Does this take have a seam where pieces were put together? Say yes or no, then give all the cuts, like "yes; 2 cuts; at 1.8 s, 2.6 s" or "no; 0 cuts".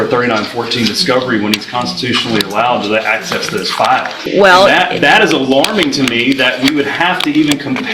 yes; 1 cut; at 4.2 s